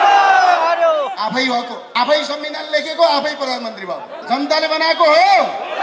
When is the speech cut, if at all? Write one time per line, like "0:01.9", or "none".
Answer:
0:01.8
0:04.1